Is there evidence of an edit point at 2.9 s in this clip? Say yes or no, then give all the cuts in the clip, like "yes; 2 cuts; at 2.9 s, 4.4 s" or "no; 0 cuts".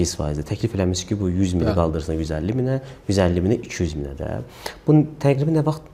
no; 0 cuts